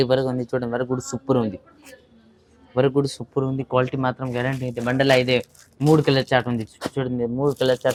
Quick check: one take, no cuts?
yes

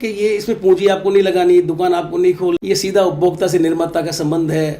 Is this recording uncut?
no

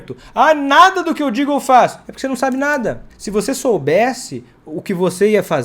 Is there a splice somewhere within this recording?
yes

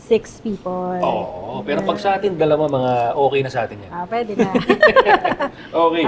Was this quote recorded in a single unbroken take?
yes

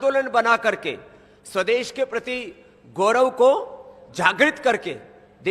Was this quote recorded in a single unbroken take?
yes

